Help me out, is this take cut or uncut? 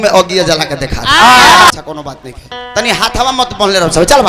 cut